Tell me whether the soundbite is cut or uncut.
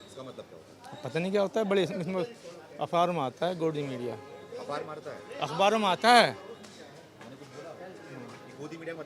uncut